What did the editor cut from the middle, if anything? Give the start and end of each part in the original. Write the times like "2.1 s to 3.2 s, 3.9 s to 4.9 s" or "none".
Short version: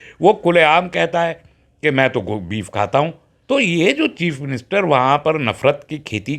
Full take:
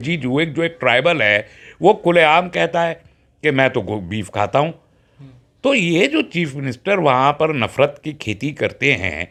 4.9 s to 5.4 s